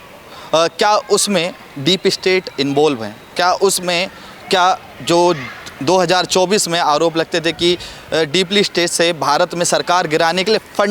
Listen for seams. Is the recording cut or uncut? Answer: uncut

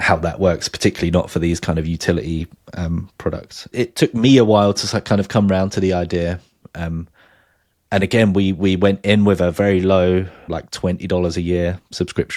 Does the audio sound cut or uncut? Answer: uncut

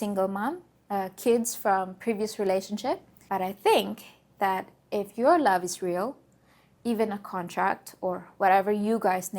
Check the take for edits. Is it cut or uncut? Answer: cut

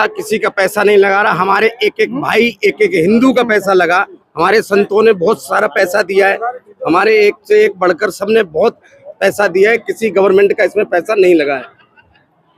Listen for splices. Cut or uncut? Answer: uncut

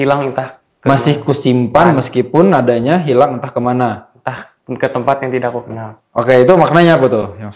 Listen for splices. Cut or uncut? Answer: uncut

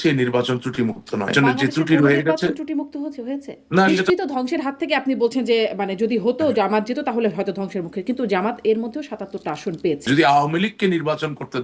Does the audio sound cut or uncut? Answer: cut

